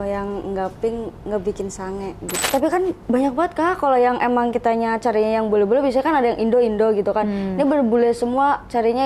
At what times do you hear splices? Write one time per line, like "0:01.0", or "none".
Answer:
0:02.3